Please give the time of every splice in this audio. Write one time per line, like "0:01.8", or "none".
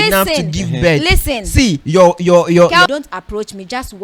0:02.9